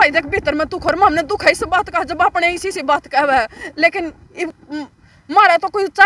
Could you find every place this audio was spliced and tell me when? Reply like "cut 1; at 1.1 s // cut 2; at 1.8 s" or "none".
none